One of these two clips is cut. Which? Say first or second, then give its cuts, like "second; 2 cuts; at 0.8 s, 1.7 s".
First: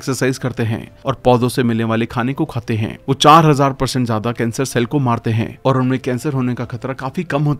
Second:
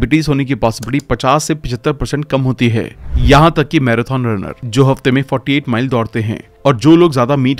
second; 1 cut; at 3.0 s